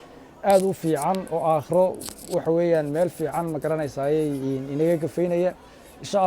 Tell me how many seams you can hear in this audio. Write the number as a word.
zero